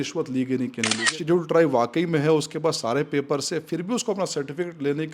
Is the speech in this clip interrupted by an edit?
yes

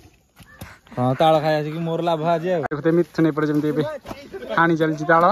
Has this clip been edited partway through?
yes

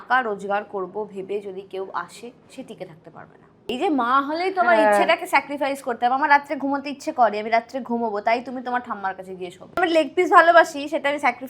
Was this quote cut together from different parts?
yes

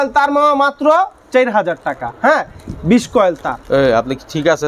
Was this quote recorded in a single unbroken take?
yes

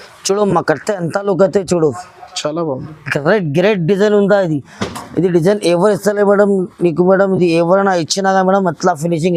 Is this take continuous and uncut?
yes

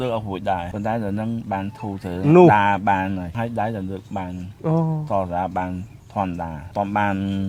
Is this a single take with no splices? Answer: yes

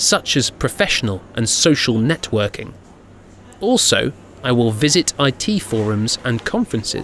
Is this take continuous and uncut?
yes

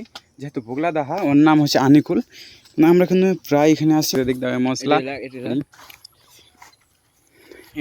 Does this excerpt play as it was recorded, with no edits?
no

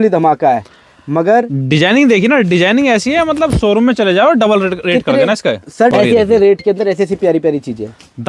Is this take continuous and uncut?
no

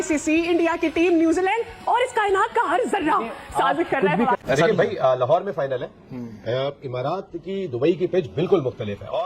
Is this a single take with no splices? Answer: no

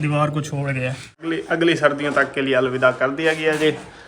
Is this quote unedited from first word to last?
no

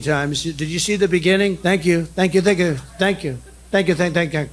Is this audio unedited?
no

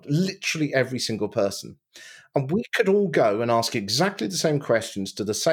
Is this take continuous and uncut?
yes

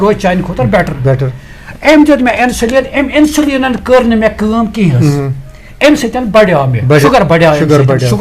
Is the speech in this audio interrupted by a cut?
yes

